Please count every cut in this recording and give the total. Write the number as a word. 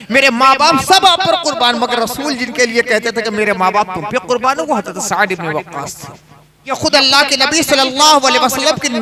one